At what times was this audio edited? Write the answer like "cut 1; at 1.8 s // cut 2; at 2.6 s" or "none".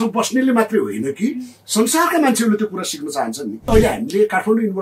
cut 1; at 3.7 s